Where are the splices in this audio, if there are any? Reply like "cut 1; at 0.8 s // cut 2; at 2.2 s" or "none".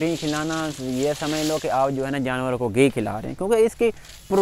none